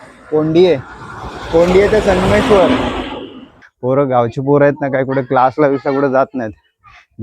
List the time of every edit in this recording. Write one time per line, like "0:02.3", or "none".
0:03.6